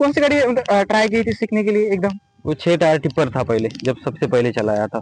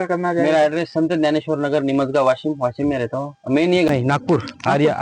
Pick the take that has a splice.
second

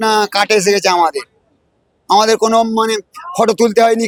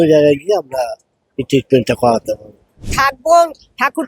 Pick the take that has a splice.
second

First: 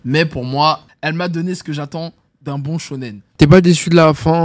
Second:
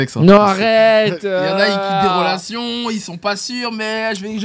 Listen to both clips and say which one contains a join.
first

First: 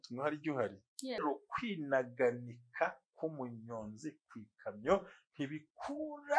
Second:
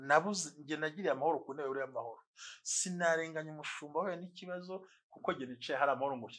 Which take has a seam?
first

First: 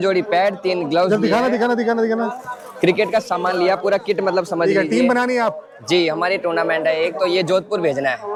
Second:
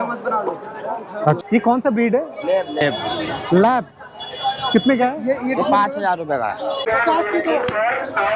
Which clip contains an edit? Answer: second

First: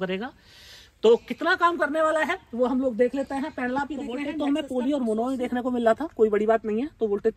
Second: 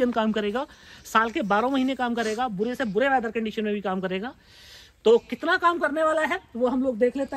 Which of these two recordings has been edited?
first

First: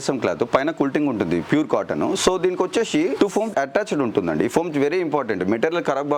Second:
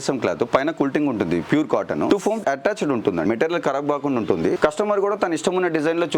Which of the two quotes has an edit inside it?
second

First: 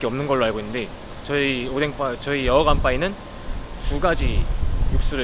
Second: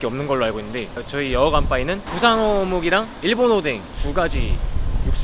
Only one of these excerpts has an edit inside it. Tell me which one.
second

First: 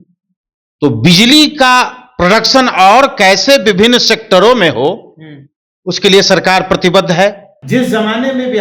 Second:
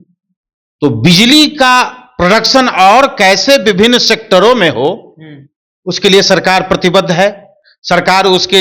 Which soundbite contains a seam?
first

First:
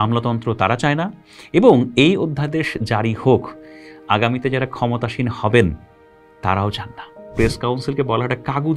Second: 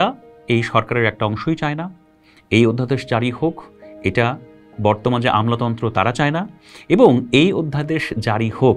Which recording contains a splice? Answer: first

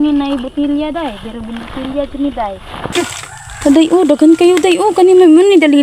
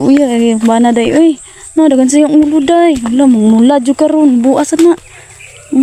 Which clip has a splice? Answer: first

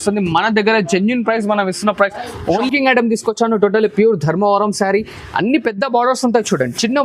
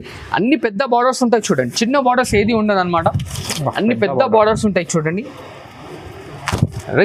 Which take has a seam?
first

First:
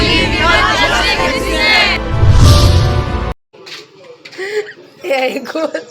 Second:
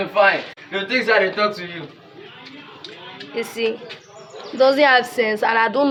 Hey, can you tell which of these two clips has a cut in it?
first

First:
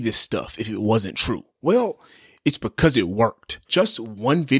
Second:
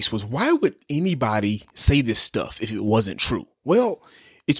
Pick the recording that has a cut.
first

